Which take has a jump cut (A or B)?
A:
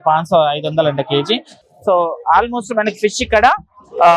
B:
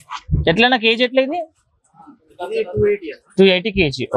A